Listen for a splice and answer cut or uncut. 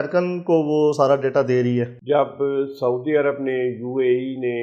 cut